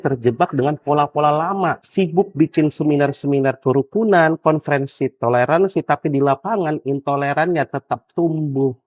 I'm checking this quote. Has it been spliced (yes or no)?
no